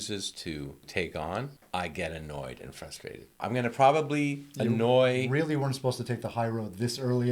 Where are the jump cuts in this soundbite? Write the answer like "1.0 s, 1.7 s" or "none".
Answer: 0.9 s, 1.6 s, 3.4 s